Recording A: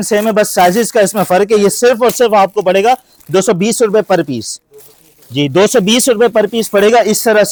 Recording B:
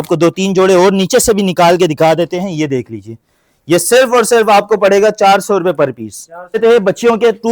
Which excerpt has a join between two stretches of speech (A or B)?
B